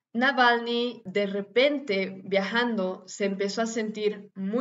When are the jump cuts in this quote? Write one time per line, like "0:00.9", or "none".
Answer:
0:01.0